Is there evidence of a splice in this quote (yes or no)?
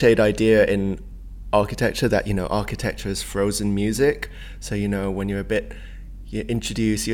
no